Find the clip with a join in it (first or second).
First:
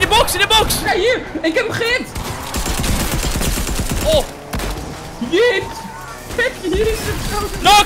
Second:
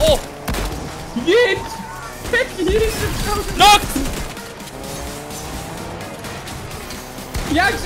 second